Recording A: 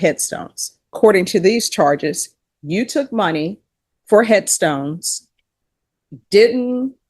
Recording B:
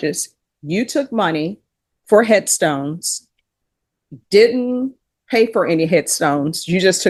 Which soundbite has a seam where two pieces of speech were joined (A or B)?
A